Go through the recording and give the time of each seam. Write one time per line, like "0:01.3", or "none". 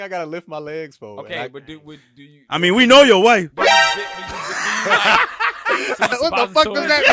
0:06.1